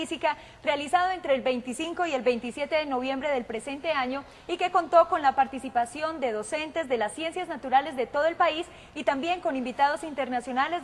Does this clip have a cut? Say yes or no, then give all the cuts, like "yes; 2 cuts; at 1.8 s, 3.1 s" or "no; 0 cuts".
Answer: yes; 1 cut; at 2.7 s